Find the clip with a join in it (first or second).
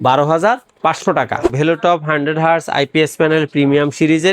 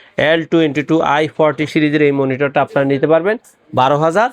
first